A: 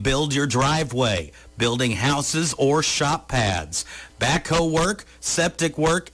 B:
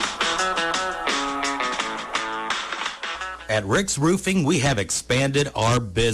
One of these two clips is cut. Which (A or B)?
B